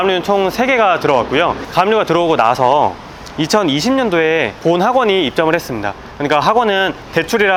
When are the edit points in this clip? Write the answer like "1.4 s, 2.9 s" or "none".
none